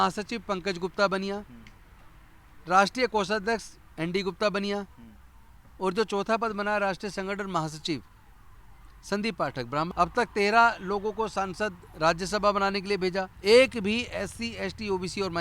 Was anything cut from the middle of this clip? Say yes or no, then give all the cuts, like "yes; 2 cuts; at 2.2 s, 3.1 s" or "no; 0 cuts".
yes; 2 cuts; at 9.9 s, 13.3 s